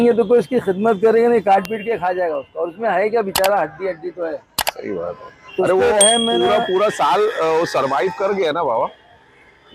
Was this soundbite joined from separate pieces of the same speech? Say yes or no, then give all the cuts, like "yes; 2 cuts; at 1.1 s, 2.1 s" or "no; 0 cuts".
no; 0 cuts